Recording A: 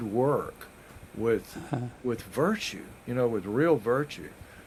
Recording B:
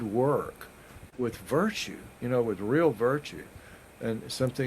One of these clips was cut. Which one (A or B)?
B